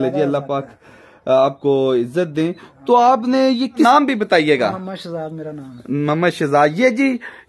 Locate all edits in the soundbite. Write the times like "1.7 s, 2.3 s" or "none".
3.9 s